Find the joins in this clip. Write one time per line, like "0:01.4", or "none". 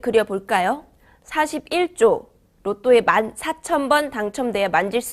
0:03.0